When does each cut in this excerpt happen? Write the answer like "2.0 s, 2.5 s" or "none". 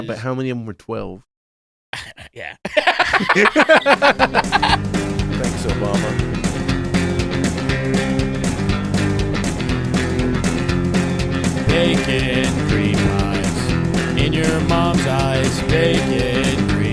4.8 s